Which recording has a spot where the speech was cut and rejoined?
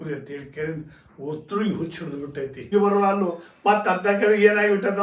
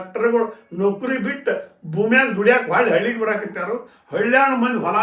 first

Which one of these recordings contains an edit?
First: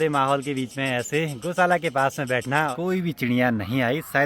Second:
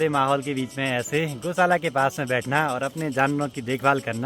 first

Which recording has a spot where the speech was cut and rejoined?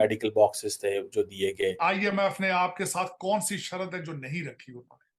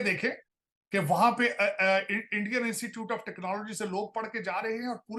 first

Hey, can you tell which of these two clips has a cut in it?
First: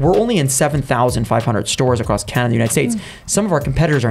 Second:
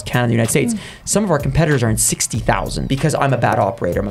second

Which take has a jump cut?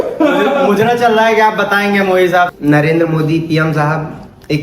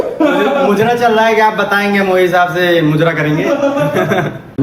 first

